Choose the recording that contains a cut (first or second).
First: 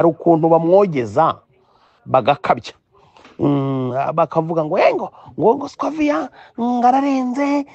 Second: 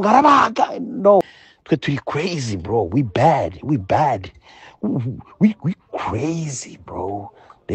second